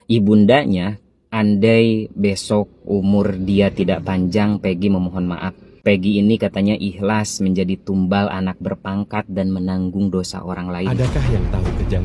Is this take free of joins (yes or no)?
no